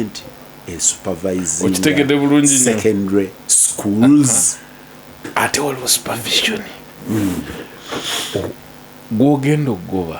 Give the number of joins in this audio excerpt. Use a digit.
0